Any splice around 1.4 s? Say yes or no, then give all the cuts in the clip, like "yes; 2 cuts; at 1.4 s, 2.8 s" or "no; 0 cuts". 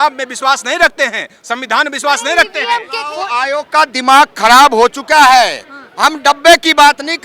no; 1 cut; at 2.9 s